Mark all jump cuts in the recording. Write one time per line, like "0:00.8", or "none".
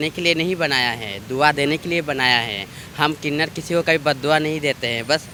none